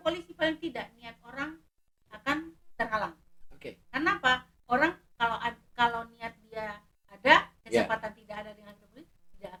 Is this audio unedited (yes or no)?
yes